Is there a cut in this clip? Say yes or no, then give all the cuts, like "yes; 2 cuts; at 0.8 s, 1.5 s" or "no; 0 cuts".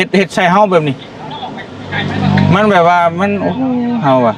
no; 0 cuts